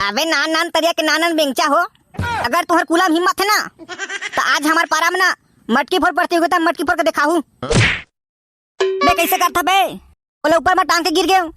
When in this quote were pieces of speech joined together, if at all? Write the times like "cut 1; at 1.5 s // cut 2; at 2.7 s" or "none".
cut 1; at 7.5 s